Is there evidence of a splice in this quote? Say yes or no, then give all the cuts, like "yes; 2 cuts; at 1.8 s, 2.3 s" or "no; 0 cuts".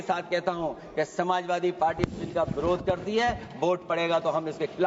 no; 0 cuts